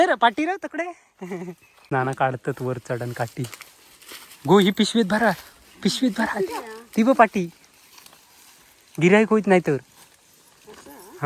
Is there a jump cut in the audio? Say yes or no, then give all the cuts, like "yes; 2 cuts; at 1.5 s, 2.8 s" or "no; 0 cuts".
yes; 1 cut; at 1.7 s